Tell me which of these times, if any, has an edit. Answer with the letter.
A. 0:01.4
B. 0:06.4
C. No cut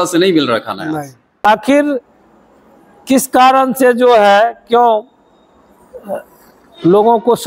A